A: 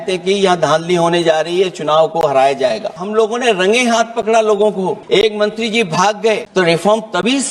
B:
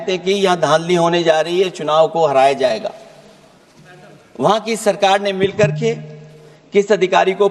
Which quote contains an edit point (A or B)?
A